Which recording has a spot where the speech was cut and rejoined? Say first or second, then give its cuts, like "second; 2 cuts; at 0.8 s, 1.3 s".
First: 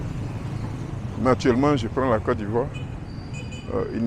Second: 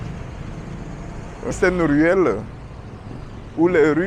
second; 1 cut; at 1.5 s